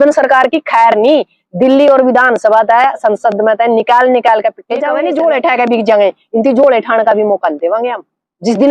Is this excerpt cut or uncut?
cut